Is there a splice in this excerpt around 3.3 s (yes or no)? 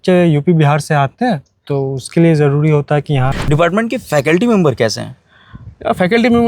yes